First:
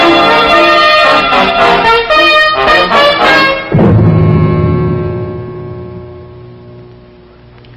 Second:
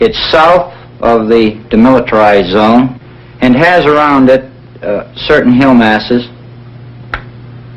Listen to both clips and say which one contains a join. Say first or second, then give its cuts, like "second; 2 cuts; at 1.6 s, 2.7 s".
first; 1 cut; at 2.0 s